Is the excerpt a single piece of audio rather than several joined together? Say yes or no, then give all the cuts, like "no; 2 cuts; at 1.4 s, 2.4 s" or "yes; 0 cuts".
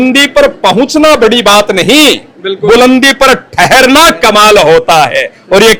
yes; 0 cuts